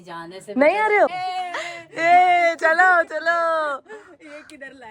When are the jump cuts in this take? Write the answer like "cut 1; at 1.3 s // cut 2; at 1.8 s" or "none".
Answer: cut 1; at 1.2 s

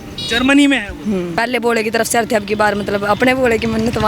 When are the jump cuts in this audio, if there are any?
cut 1; at 1.3 s

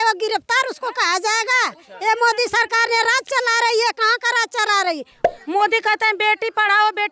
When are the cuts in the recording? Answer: cut 1; at 5.3 s

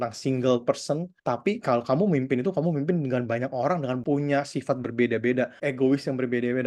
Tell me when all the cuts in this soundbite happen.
cut 1; at 1.1 s // cut 2; at 4.0 s // cut 3; at 5.6 s

